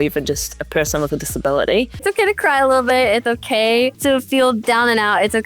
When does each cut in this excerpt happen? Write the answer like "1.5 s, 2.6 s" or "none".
2.0 s, 4.0 s